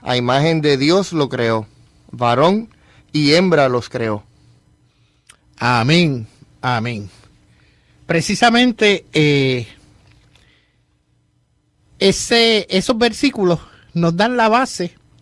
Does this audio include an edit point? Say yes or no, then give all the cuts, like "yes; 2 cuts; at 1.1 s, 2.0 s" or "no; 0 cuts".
no; 0 cuts